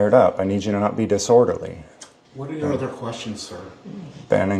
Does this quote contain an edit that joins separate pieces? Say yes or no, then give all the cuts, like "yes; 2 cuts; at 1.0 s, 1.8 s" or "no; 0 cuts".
no; 0 cuts